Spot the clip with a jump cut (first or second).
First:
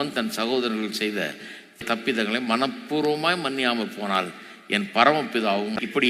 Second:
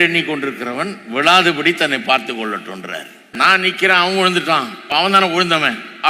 second